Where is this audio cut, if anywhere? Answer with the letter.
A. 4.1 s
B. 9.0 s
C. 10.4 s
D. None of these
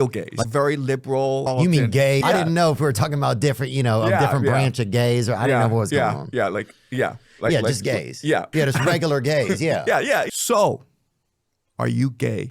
C